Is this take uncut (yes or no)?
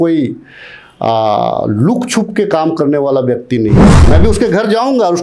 no